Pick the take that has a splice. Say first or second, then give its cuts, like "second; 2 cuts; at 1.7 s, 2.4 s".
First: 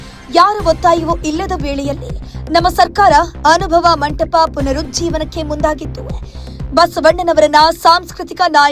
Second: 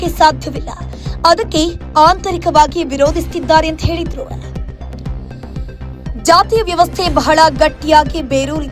second; 2 cuts; at 4.3 s, 6.2 s